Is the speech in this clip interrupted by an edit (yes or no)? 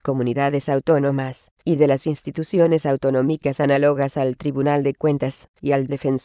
yes